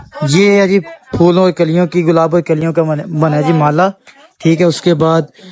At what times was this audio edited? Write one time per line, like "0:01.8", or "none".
none